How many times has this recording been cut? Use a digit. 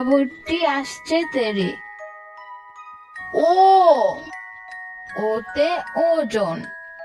0